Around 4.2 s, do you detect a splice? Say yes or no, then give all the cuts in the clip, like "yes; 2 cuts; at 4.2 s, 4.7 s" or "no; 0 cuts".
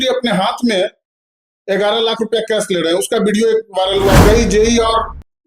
yes; 1 cut; at 4.2 s